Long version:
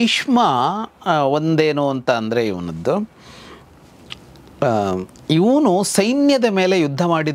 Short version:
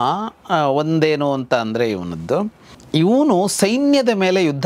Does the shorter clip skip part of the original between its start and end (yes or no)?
yes